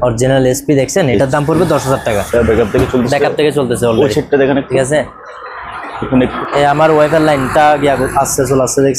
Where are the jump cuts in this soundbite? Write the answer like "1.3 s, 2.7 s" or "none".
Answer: 2.3 s, 6.3 s